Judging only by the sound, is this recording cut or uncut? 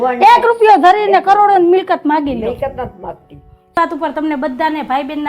cut